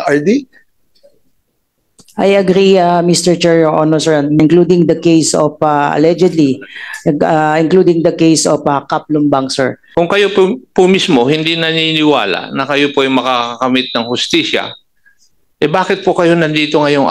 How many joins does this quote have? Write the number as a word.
two